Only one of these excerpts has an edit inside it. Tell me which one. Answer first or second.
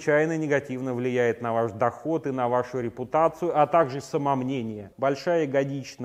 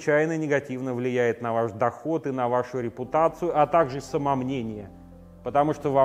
first